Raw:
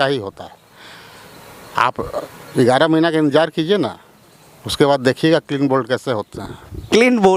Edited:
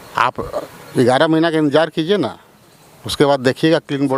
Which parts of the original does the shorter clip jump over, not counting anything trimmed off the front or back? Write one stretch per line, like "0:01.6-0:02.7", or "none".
none